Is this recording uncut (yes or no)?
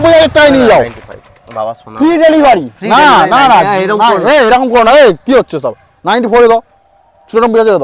yes